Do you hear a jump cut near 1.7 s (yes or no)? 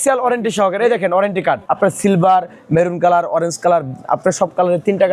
yes